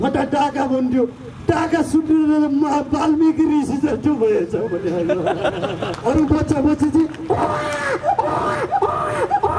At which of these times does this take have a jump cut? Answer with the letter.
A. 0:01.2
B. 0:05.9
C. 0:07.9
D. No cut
B